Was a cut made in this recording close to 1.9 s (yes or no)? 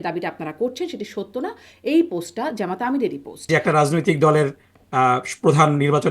no